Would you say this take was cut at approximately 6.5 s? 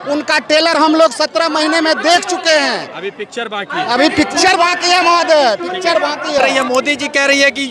yes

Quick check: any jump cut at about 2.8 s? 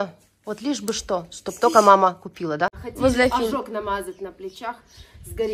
yes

